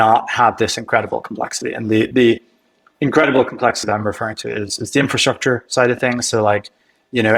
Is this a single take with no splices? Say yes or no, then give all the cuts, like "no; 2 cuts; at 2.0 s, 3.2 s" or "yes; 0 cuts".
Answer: yes; 0 cuts